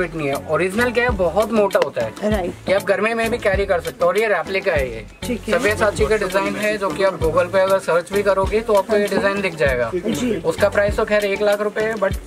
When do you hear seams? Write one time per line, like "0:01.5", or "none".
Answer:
none